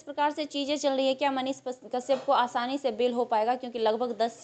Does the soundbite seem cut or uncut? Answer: uncut